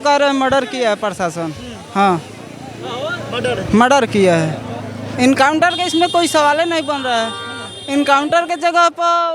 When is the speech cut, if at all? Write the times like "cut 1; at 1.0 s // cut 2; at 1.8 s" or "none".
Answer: none

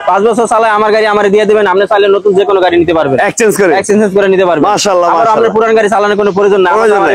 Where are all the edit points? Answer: none

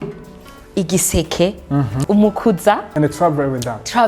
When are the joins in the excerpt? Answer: cut 1; at 2.0 s // cut 2; at 2.9 s

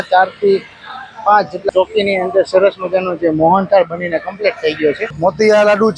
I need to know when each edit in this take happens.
cut 1; at 1.6 s // cut 2; at 5.1 s

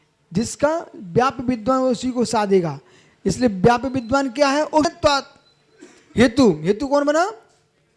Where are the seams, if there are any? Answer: cut 1; at 4.8 s

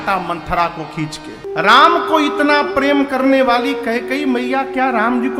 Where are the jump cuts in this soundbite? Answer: cut 1; at 1.4 s

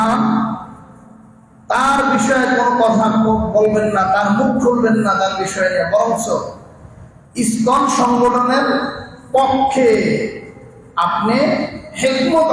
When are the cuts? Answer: none

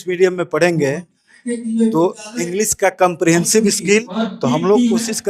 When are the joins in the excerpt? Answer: cut 1; at 4.1 s

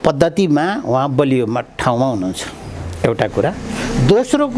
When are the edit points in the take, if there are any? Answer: none

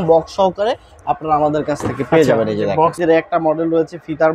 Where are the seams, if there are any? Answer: cut 1; at 3.0 s

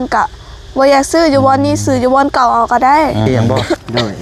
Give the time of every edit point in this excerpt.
cut 1; at 3.3 s

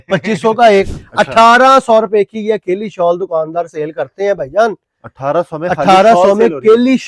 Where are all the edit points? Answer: cut 1; at 1.0 s

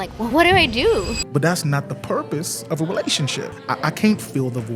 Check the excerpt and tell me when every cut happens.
cut 1; at 1.2 s // cut 2; at 3.6 s

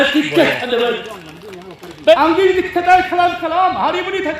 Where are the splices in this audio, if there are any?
cut 1; at 2.1 s

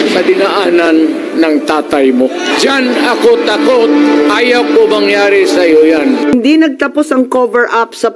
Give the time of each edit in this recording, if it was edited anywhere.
cut 1; at 6.3 s

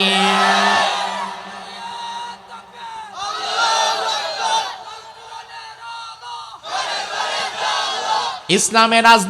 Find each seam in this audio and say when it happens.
cut 1; at 8.4 s

